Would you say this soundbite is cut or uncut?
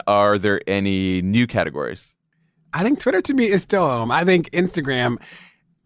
cut